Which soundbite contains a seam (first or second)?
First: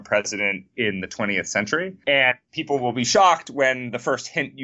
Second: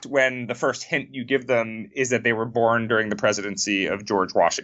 first